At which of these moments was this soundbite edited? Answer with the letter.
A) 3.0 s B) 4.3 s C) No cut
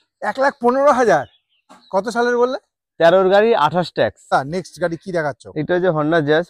B